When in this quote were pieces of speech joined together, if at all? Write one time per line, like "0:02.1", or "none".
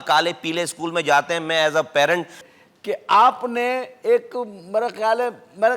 0:02.4